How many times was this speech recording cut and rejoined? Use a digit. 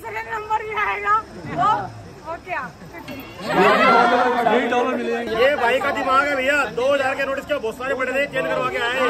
1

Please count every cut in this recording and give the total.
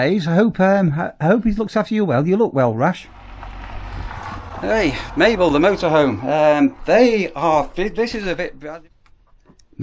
2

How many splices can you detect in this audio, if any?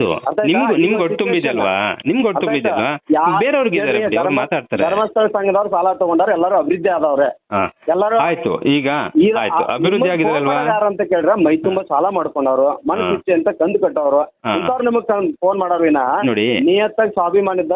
0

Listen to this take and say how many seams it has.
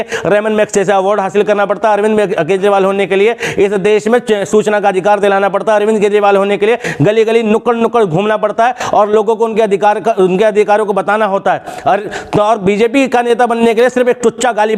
0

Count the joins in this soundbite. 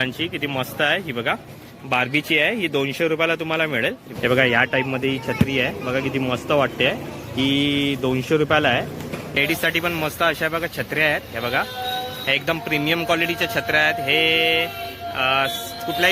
2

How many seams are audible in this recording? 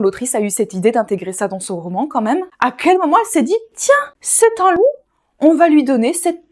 0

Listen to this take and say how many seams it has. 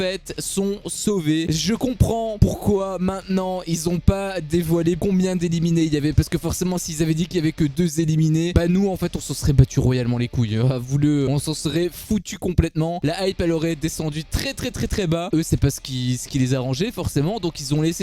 0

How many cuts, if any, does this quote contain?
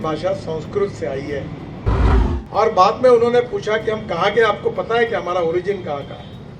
1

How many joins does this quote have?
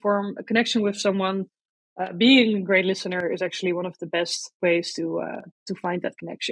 0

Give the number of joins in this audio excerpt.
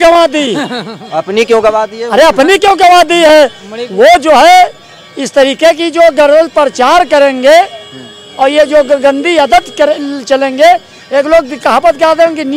0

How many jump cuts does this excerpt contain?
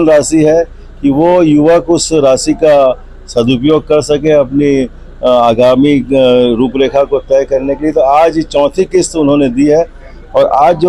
0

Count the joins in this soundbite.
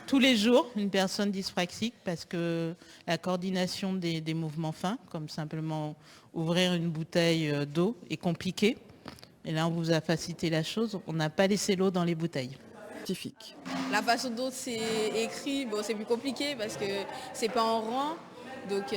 1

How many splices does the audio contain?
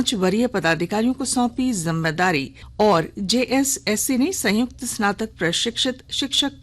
1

